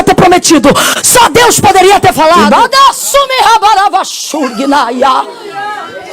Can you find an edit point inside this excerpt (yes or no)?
yes